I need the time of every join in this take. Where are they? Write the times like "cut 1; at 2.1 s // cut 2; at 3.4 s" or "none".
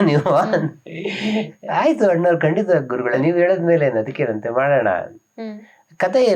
cut 1; at 3.2 s